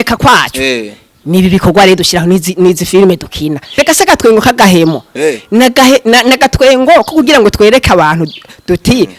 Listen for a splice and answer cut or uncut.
cut